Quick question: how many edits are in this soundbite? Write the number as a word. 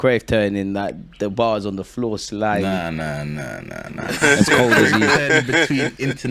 zero